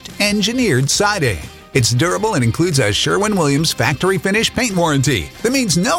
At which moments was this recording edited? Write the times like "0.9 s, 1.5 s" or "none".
none